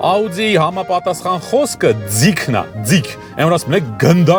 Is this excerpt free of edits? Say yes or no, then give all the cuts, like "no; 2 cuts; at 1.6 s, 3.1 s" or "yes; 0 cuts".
yes; 0 cuts